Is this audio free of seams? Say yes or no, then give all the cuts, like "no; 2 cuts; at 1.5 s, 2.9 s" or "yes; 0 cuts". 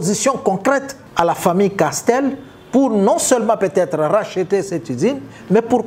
no; 1 cut; at 1.0 s